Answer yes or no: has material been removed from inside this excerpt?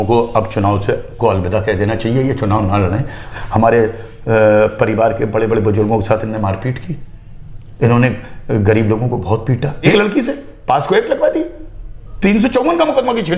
yes